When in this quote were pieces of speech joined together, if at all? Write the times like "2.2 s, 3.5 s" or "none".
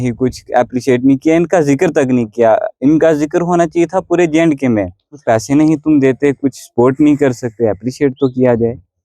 5.2 s